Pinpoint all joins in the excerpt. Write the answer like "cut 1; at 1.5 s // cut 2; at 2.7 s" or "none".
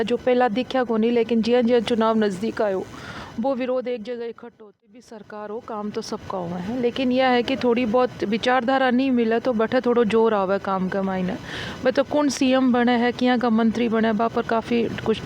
cut 1; at 4.8 s